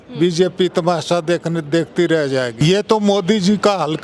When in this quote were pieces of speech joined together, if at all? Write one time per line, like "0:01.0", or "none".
0:02.6

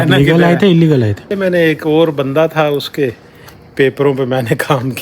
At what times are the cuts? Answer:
0:01.3

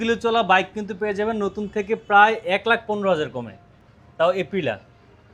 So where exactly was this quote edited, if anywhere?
none

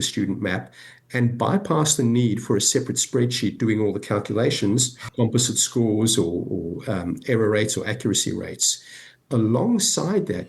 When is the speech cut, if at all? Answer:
0:05.0

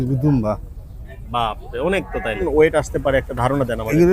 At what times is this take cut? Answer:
0:02.4

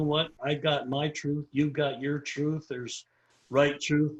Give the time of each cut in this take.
none

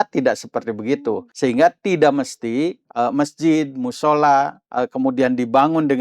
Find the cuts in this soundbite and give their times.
0:01.3
0:02.8
0:04.6

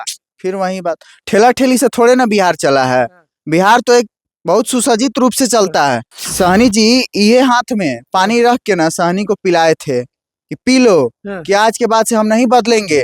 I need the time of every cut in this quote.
0:06.1

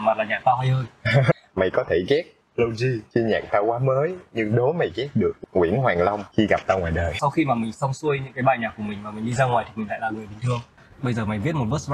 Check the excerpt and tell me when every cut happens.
0:01.3
0:03.0
0:05.4
0:06.2
0:07.2
0:10.8

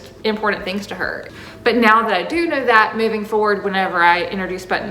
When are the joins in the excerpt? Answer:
0:01.2

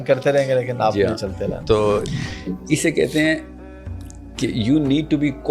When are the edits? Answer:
0:02.2

